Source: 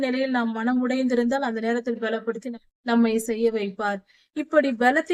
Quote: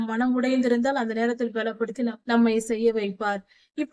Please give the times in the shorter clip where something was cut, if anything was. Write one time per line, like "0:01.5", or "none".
0:02.2